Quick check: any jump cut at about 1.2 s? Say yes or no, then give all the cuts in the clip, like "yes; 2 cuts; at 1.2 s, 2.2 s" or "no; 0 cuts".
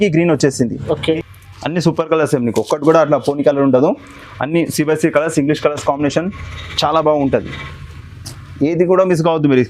yes; 1 cut; at 1.2 s